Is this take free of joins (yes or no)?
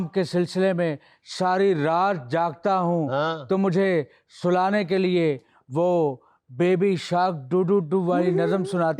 yes